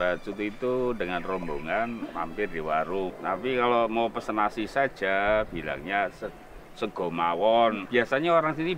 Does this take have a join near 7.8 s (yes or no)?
yes